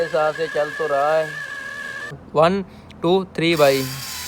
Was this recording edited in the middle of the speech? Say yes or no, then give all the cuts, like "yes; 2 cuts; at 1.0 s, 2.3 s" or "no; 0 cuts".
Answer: yes; 1 cut; at 2.2 s